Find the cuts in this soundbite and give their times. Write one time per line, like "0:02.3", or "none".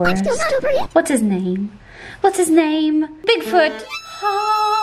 0:03.2